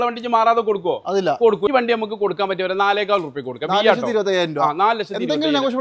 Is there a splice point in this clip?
yes; 1 cut; at 1.7 s

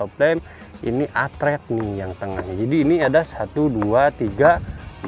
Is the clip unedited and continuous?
yes; 0 cuts

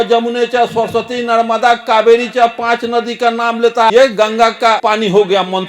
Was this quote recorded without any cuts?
no; 2 cuts; at 3.9 s, 4.8 s

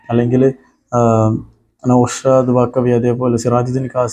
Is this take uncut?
yes; 0 cuts

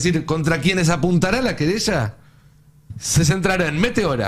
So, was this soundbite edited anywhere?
no; 0 cuts

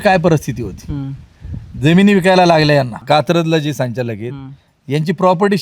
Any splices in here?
yes; 1 cut; at 3.0 s

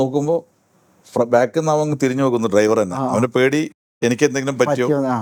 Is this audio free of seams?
yes; 0 cuts

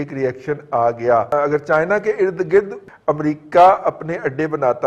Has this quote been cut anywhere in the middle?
yes; 2 cuts; at 1.3 s, 2.8 s

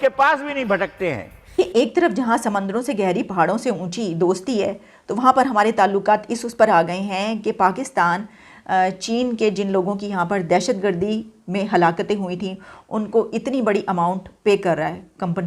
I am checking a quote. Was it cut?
yes; 1 cut; at 1.5 s

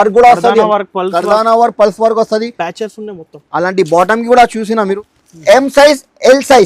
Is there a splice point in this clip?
yes; 1 cut; at 4.9 s

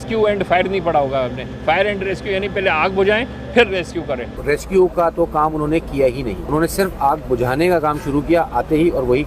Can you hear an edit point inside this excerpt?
yes; 2 cuts; at 4.4 s, 6.4 s

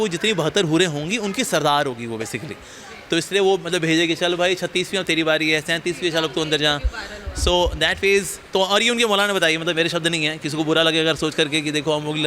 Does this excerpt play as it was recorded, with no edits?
yes; 0 cuts

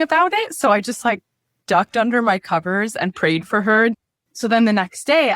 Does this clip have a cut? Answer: yes; 1 cut; at 4.0 s

